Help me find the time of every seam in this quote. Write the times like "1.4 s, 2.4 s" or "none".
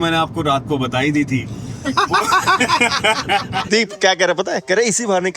3.6 s